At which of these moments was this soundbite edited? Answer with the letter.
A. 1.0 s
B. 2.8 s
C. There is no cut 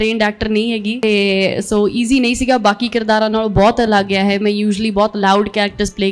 A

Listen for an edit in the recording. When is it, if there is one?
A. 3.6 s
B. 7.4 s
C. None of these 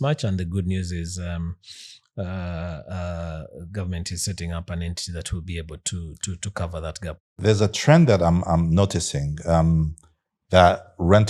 B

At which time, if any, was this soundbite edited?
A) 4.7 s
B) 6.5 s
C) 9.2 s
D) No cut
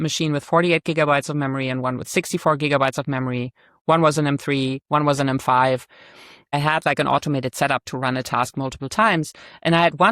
B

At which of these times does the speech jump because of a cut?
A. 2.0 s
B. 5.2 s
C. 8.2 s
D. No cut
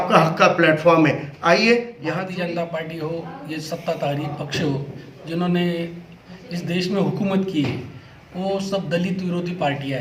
A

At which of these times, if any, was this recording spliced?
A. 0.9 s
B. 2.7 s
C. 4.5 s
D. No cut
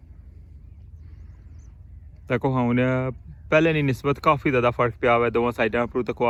D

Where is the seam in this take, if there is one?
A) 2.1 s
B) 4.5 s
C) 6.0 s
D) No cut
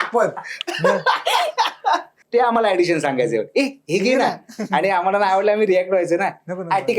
A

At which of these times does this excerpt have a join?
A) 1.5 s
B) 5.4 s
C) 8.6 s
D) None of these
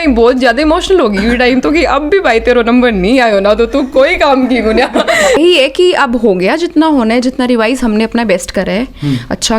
B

